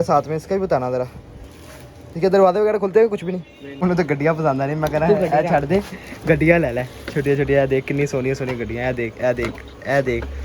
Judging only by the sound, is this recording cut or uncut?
cut